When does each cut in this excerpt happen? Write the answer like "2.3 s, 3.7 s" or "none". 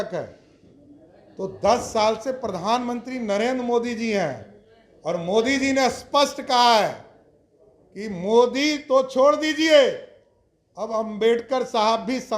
none